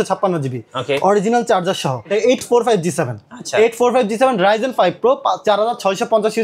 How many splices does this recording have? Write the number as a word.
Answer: one